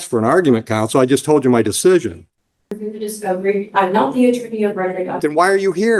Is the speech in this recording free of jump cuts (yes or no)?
no